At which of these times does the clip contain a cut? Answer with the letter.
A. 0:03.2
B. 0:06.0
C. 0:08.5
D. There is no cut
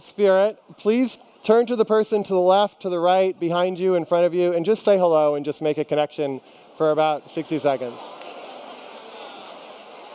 A